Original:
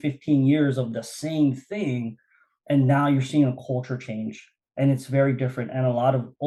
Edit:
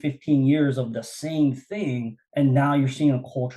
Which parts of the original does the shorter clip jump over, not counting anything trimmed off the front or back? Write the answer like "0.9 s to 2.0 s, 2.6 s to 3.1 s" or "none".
2.2 s to 2.5 s